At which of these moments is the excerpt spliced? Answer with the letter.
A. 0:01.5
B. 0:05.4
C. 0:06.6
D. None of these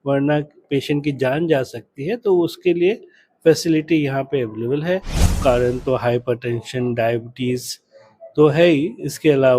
B